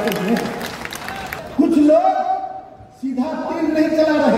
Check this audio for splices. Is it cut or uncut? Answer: cut